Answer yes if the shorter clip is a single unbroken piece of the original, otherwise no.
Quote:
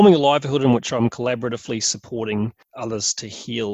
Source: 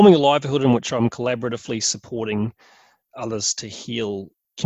no